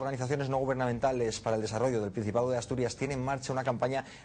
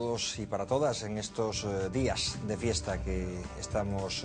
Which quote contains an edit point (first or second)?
second